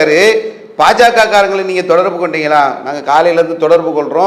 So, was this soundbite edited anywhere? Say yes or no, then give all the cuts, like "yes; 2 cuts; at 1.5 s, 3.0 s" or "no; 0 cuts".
no; 0 cuts